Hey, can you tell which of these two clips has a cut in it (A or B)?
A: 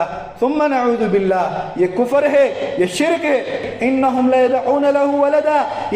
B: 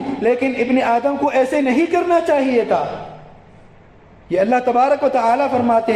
A